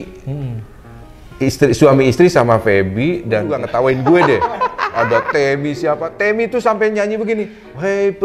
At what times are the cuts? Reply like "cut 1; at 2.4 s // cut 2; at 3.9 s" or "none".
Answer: cut 1; at 3.5 s